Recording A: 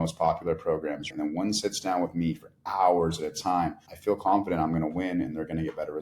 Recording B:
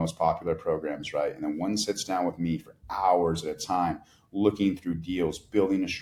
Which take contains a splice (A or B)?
A